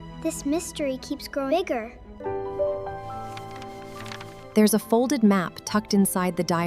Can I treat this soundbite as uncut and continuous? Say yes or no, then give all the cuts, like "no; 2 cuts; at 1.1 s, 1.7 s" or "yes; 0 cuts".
no; 1 cut; at 2.0 s